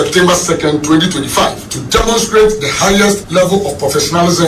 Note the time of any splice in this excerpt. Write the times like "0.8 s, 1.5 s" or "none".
3.2 s